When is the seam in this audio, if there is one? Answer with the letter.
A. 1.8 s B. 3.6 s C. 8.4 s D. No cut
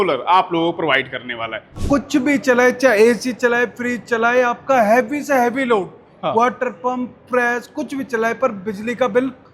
A